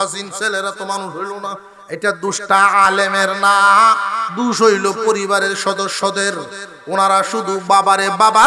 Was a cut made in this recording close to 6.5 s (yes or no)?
no